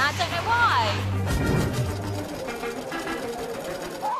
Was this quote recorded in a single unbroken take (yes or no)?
no